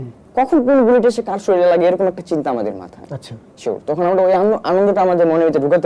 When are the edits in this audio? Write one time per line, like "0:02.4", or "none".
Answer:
none